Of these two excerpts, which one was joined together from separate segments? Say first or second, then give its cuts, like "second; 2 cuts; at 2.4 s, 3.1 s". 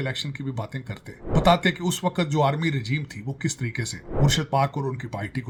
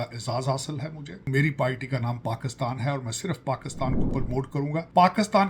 second; 2 cuts; at 1.3 s, 4.2 s